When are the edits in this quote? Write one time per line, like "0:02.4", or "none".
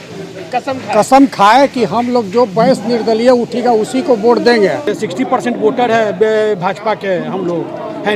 0:04.9